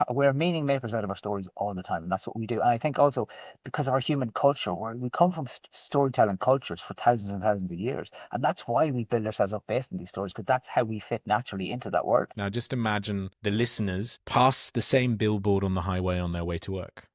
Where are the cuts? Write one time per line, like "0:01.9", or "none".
0:12.3
0:13.3
0:14.2

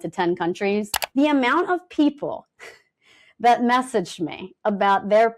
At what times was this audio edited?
0:01.0

